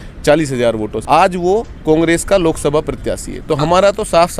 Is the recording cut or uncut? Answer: cut